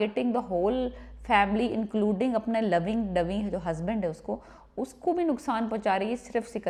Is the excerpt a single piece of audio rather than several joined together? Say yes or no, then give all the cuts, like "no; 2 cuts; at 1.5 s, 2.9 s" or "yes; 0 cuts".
yes; 0 cuts